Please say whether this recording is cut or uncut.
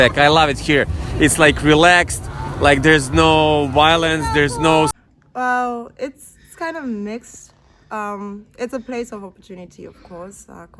cut